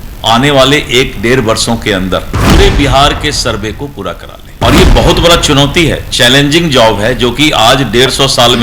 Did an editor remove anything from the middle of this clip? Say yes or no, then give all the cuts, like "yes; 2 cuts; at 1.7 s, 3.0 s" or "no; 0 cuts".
no; 0 cuts